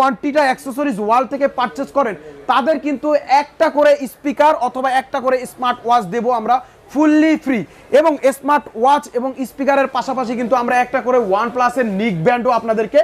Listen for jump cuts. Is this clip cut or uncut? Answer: uncut